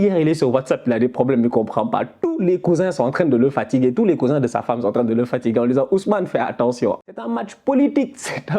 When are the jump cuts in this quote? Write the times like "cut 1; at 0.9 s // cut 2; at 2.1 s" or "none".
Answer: cut 1; at 7.0 s

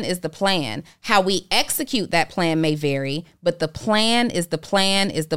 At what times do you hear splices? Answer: none

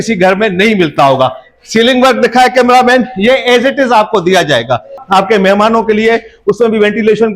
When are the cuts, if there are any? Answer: cut 1; at 4.9 s

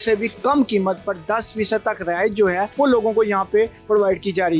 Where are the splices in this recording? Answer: cut 1; at 2.7 s

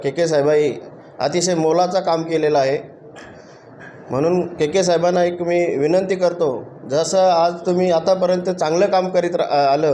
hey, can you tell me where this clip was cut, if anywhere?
none

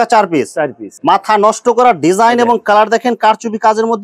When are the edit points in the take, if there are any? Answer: cut 1; at 1.0 s

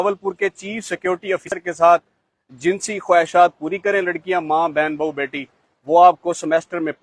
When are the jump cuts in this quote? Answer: cut 1; at 1.5 s

